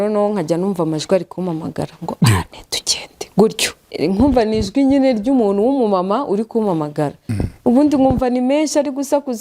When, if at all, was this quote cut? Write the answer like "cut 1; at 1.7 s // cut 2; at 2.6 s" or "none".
cut 1; at 3.9 s